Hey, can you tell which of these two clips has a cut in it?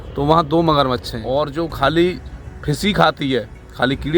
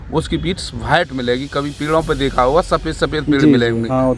first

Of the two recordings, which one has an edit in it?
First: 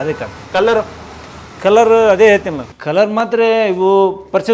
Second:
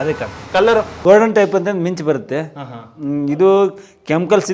second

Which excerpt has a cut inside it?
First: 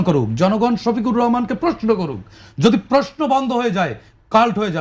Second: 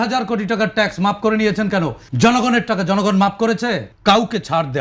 second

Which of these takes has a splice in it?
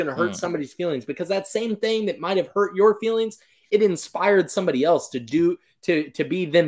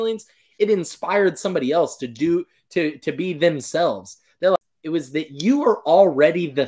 second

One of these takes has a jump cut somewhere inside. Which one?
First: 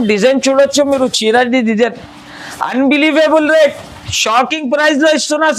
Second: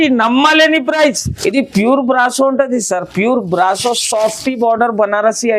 second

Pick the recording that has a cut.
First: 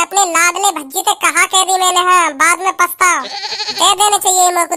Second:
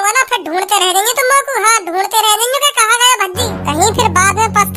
second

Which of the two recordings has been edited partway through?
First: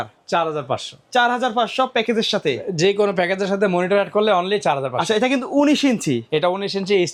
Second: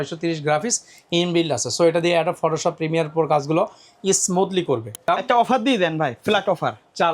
second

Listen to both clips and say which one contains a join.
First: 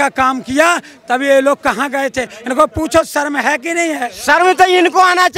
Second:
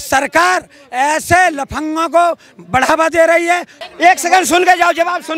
second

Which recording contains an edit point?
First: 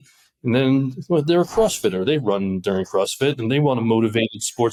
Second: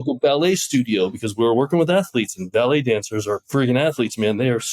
second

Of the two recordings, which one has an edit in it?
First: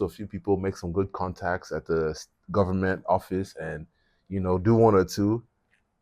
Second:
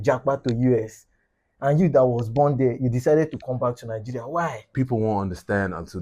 second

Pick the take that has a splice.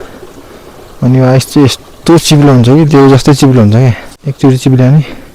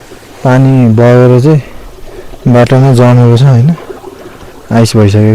first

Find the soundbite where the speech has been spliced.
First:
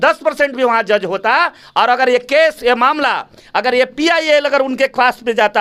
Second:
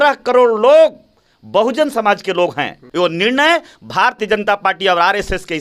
second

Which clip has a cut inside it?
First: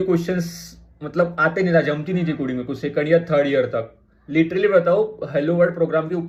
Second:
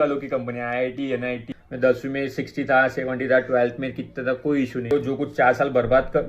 second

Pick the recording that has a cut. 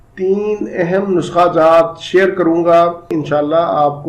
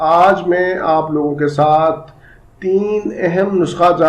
first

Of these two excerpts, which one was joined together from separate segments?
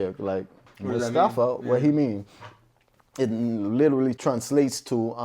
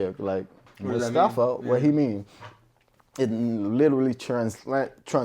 first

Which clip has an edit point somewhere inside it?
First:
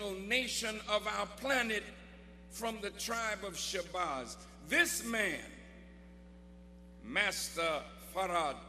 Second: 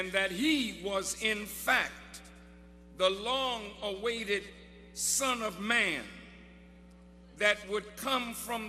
first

